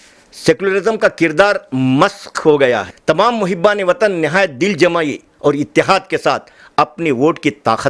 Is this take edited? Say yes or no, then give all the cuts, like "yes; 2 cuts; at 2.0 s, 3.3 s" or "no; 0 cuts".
yes; 1 cut; at 2.9 s